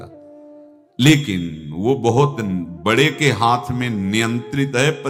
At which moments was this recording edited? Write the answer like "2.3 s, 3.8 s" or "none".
none